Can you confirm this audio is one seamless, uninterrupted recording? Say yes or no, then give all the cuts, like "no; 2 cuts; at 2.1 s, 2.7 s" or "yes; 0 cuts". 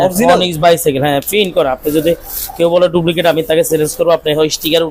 yes; 0 cuts